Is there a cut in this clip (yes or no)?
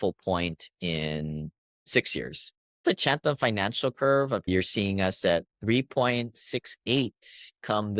yes